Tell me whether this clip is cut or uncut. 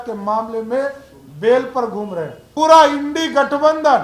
cut